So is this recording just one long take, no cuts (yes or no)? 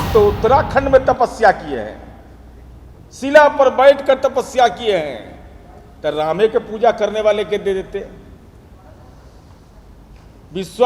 yes